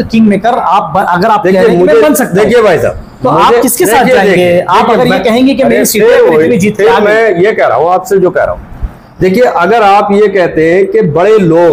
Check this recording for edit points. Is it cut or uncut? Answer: uncut